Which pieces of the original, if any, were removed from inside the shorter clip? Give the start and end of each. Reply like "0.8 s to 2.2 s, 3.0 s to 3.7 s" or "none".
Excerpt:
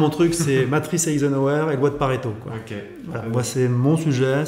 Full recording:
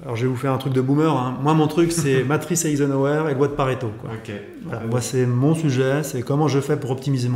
none